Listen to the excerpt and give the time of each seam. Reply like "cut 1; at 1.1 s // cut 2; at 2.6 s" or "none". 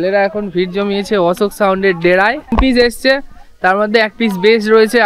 cut 1; at 2.5 s

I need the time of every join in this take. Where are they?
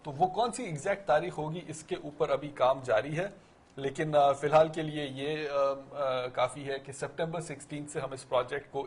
cut 1; at 1.8 s

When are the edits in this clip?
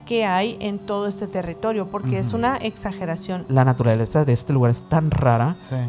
cut 1; at 3.4 s

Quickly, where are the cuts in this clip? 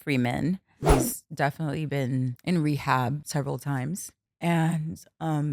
cut 1; at 0.8 s // cut 2; at 2.4 s // cut 3; at 3.2 s // cut 4; at 4.2 s

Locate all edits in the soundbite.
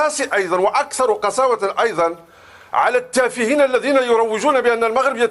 none

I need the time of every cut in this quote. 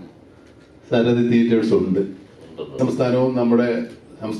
cut 1; at 2.8 s

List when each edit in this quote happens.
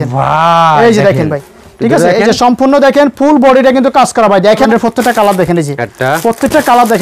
cut 1; at 4.7 s

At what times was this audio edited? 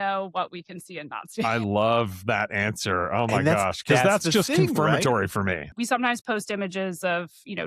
cut 1; at 5.7 s

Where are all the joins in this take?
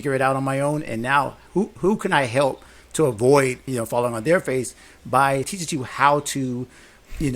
cut 1; at 3.6 s // cut 2; at 5.5 s

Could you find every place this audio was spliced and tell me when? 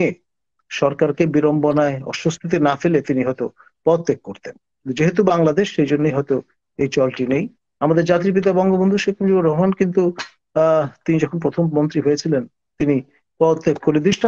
none

